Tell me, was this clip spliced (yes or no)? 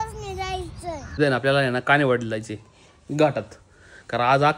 yes